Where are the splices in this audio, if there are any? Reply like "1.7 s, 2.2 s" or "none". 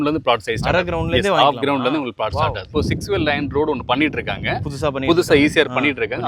2.7 s